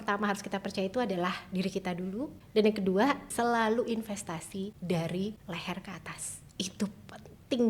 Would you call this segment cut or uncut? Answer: cut